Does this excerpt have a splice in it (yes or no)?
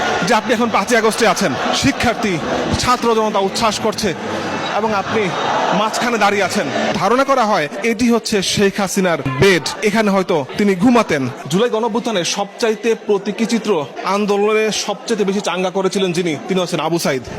yes